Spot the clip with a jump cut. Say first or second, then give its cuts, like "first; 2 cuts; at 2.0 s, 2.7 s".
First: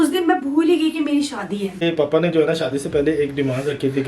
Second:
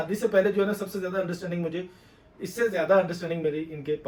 first; 1 cut; at 1.8 s